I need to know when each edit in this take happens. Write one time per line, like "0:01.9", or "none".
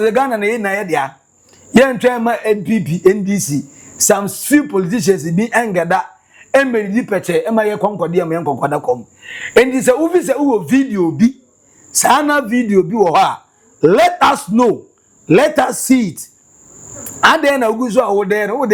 none